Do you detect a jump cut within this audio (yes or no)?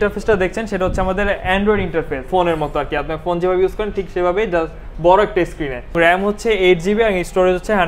yes